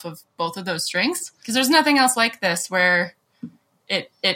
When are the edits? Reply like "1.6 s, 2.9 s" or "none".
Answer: 1.3 s